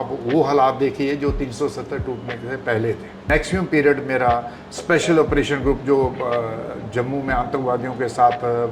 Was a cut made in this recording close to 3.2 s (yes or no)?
yes